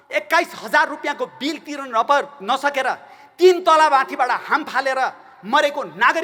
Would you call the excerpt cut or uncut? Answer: uncut